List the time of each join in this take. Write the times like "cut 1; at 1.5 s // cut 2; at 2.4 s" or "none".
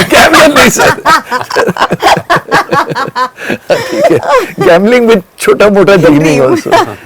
none